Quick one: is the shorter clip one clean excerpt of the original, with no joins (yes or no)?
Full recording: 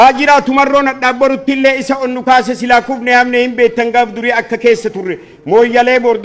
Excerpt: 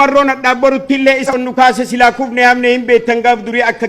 no